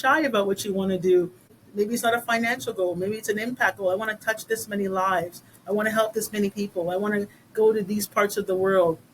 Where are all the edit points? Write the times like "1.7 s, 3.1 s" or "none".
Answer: 1.6 s

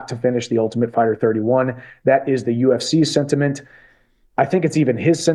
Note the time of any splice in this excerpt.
2.2 s

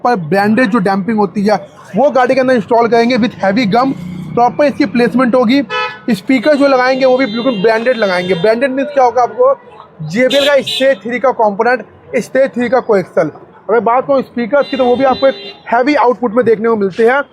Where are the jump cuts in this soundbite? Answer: none

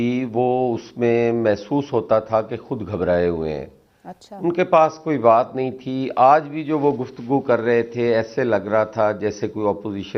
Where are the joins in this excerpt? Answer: none

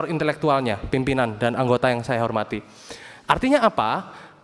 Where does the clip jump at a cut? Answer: none

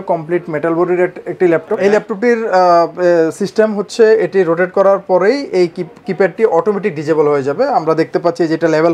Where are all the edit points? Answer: 1.8 s

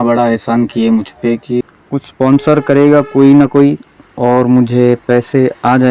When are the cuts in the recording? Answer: 1.6 s

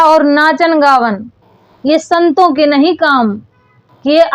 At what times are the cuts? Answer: none

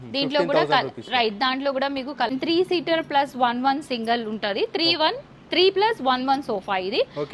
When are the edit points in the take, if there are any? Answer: 2.3 s

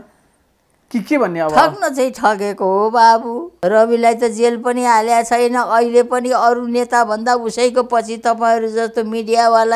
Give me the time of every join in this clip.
3.4 s

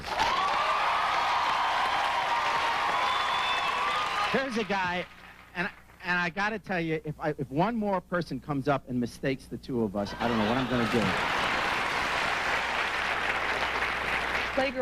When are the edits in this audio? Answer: none

